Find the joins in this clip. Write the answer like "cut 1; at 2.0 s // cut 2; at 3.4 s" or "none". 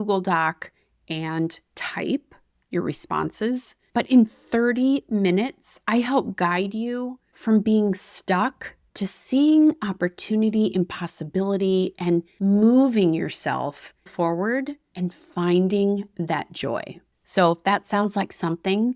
none